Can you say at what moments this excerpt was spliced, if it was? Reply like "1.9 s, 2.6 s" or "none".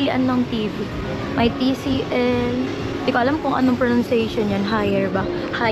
none